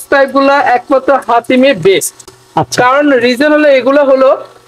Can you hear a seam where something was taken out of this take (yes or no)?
no